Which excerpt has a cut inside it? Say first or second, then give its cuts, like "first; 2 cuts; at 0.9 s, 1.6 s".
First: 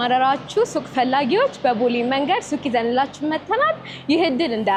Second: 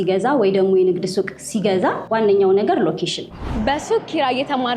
second; 2 cuts; at 2.0 s, 3.3 s